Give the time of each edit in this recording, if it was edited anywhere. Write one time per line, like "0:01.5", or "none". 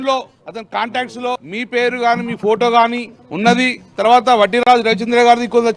0:04.6